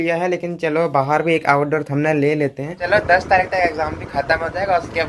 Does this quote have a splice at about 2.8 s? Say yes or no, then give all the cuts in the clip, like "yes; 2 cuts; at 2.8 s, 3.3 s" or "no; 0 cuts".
yes; 1 cut; at 2.8 s